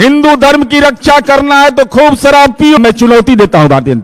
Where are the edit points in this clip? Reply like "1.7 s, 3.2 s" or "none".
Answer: 2.8 s